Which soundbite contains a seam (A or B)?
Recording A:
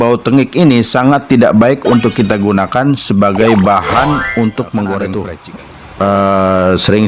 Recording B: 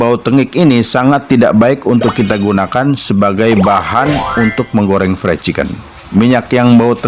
A